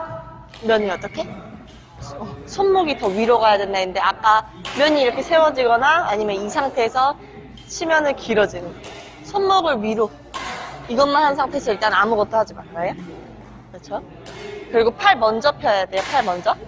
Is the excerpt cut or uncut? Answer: uncut